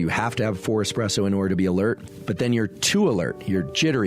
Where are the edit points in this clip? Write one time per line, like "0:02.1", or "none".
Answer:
0:02.1